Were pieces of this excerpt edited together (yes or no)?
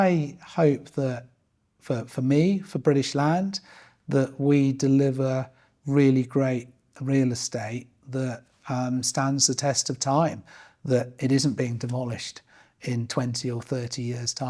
no